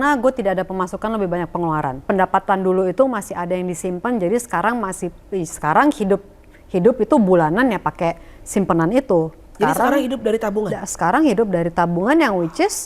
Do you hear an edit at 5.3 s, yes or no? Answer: no